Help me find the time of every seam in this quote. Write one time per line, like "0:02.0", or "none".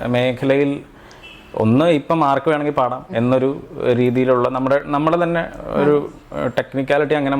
none